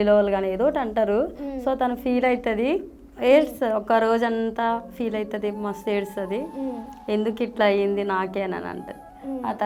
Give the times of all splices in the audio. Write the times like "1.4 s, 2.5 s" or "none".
none